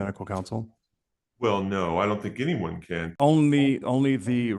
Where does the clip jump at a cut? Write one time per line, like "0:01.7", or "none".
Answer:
0:03.1